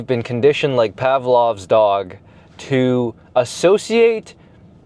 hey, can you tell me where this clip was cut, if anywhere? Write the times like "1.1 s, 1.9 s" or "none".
none